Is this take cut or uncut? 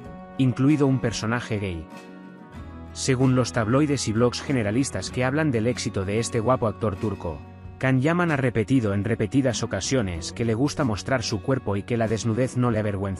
cut